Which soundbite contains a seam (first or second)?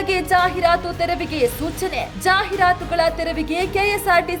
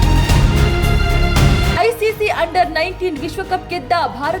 second